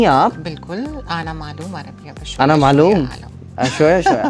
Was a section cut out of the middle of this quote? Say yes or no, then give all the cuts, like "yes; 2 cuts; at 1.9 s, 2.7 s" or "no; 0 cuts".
no; 0 cuts